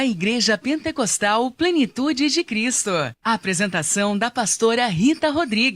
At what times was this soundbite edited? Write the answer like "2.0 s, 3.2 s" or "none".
3.1 s